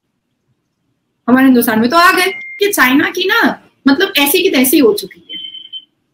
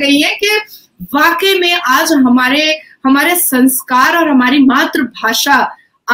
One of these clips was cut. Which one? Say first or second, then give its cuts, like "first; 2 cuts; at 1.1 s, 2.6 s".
first; 1 cut; at 2.4 s